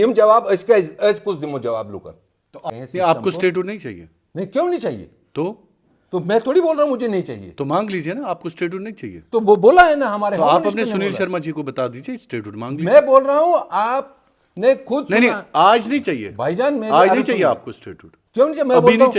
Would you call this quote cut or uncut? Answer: cut